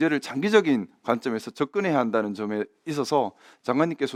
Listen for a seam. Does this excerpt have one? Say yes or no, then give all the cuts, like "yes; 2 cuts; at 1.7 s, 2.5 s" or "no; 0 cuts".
no; 0 cuts